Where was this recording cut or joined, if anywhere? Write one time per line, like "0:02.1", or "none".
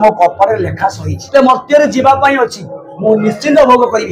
0:01.3